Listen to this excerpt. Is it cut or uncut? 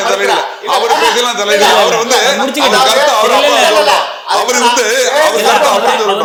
uncut